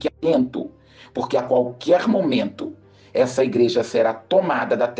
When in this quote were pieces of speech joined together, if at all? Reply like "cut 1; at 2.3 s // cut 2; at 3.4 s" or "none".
none